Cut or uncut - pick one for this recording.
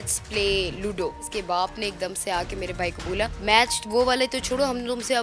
cut